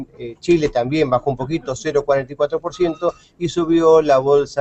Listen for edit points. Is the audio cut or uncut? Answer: uncut